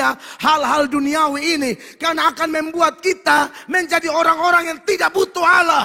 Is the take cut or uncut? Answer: uncut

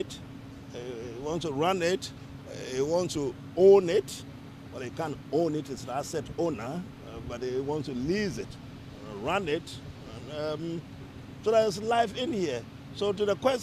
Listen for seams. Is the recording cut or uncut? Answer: uncut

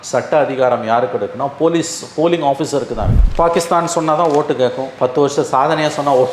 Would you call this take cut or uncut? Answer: cut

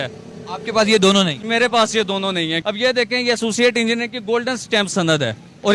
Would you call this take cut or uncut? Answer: cut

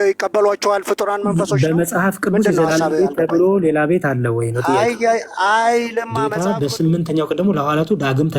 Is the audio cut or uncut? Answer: cut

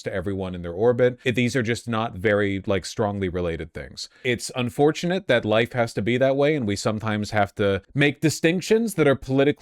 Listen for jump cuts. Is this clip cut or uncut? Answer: cut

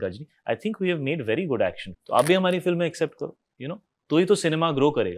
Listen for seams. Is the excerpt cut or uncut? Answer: cut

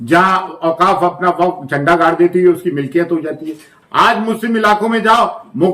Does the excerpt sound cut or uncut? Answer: cut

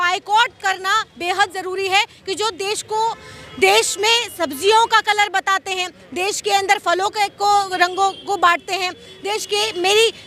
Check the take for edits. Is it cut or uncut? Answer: uncut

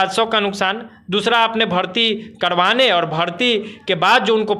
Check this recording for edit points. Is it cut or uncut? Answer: uncut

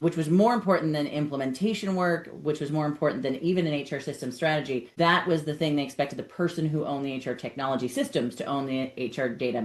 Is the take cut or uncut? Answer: cut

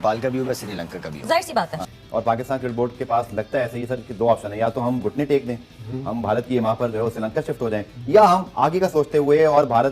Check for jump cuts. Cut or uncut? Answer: cut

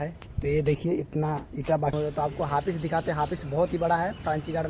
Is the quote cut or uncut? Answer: cut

